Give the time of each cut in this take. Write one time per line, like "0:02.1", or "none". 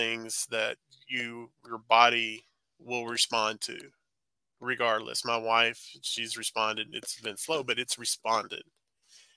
none